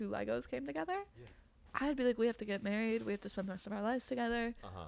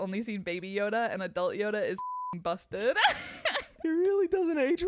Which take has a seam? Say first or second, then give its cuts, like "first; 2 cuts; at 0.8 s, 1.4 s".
second; 1 cut; at 3.7 s